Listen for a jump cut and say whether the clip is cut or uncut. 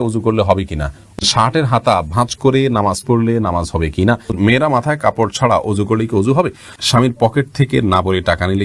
cut